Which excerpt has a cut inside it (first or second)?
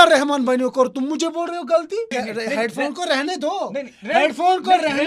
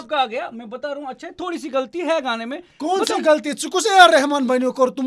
first